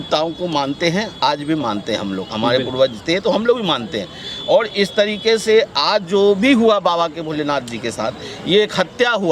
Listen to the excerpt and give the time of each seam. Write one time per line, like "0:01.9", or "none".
none